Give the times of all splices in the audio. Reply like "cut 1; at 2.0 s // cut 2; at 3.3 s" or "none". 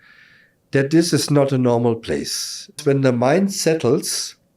cut 1; at 2.8 s